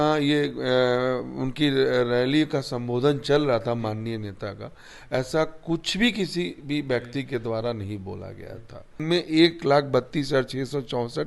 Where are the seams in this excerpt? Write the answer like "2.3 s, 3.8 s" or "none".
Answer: 9.0 s